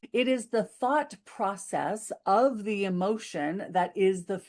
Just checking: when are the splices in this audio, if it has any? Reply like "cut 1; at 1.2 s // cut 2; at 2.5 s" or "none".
none